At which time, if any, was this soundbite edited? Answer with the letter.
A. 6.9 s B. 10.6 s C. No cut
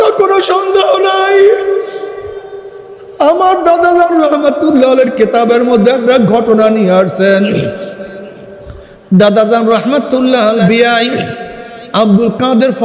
B